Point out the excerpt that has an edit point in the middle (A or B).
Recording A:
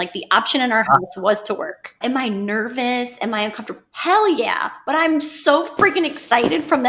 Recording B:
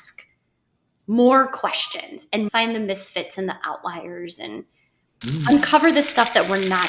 A